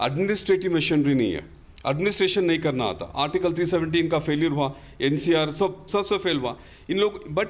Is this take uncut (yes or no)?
yes